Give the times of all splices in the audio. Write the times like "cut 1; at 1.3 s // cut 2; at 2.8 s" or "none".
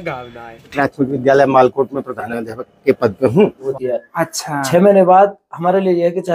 cut 1; at 0.7 s // cut 2; at 3.7 s